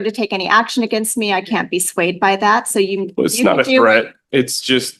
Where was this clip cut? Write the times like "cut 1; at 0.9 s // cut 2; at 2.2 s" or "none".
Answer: none